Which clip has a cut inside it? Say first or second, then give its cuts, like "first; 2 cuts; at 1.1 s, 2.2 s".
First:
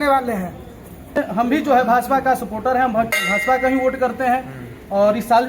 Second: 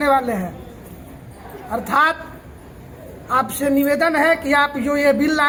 first; 1 cut; at 1.2 s